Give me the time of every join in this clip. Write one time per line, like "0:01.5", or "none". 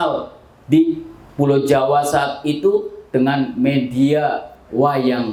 none